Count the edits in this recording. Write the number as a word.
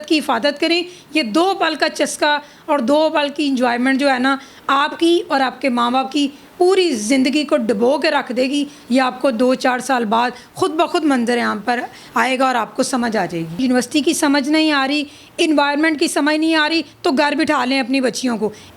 one